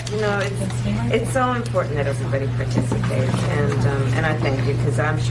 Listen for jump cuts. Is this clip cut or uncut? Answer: uncut